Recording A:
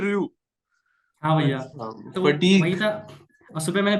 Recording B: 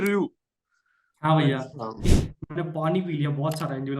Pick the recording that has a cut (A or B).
B